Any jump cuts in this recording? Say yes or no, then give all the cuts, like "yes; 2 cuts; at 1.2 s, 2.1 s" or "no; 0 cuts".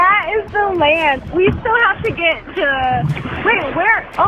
yes; 2 cuts; at 1.2 s, 3.3 s